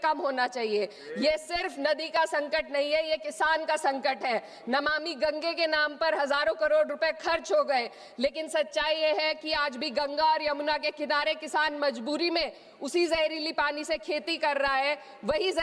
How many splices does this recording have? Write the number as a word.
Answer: zero